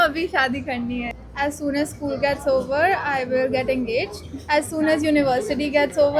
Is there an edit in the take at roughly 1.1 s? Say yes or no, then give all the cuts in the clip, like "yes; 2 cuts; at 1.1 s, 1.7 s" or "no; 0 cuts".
yes; 1 cut; at 1.1 s